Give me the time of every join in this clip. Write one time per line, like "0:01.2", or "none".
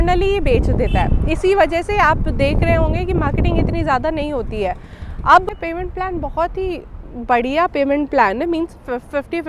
0:05.4